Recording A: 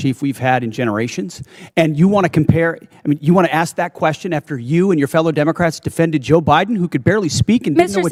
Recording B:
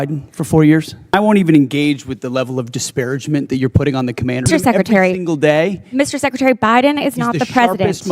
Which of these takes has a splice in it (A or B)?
B